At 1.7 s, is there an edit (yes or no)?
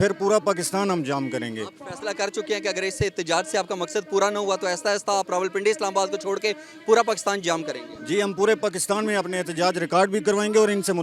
no